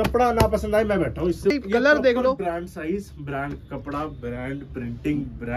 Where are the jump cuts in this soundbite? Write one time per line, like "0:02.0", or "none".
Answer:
0:01.5